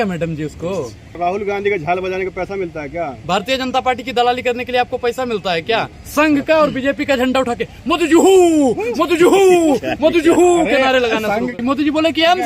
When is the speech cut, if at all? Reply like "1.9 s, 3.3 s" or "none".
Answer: 1.1 s, 6.0 s, 11.5 s